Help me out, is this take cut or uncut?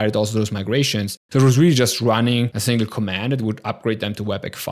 cut